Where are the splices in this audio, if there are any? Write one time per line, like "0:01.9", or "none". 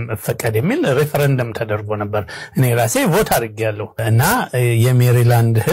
0:04.0